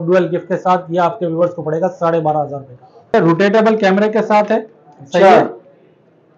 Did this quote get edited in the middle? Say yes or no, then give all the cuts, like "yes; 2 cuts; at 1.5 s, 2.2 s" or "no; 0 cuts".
yes; 1 cut; at 3.1 s